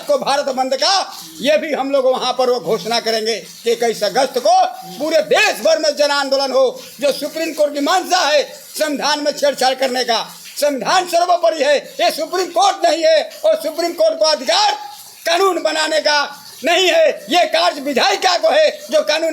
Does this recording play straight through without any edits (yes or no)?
yes